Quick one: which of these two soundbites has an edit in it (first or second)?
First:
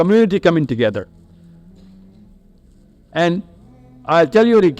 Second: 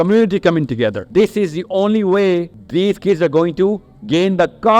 second